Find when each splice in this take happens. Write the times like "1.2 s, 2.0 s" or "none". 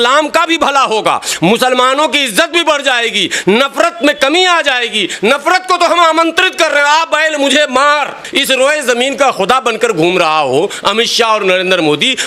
8.3 s